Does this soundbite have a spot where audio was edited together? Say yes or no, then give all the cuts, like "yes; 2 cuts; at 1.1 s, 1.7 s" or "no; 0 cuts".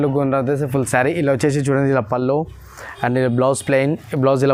no; 0 cuts